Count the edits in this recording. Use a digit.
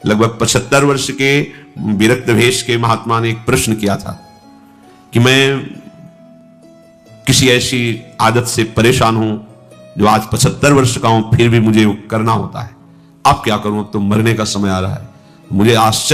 0